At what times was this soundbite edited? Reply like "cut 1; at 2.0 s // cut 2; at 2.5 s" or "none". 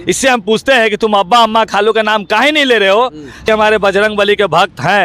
cut 1; at 3.5 s